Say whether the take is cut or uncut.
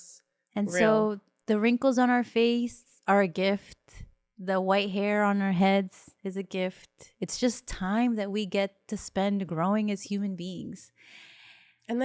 cut